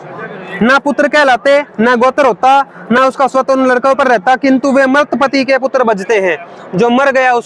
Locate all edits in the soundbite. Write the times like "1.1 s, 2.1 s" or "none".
none